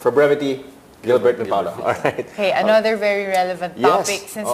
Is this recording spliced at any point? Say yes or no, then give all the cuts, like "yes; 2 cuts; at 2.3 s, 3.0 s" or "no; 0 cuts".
no; 0 cuts